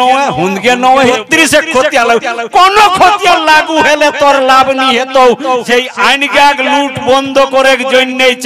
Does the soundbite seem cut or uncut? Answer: cut